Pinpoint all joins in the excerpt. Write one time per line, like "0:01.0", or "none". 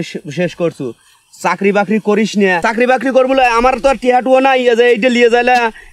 0:02.6